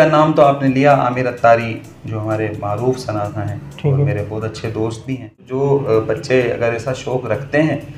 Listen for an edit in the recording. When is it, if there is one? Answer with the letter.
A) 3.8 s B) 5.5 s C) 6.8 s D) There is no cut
B